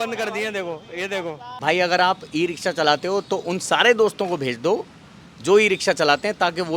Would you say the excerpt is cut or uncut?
cut